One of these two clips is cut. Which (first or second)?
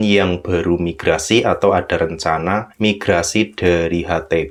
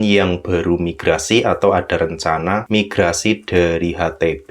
second